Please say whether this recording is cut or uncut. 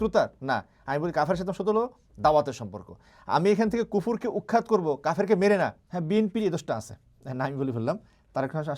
cut